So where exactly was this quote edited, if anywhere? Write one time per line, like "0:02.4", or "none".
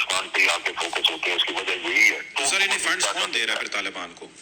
0:02.3